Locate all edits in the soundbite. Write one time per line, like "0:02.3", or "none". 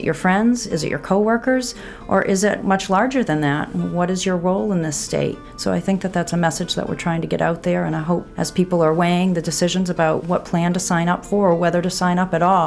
0:02.6
0:05.5
0:08.4
0:10.2

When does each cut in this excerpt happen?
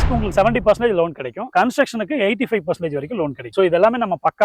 none

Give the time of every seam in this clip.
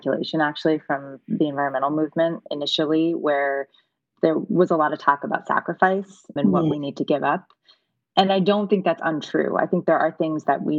none

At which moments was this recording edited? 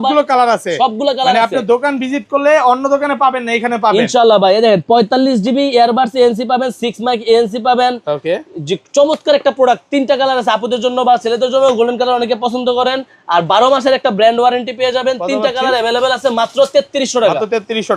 none

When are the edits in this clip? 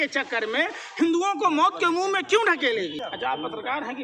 0:03.0

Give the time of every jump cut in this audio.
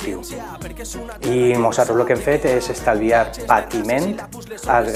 none

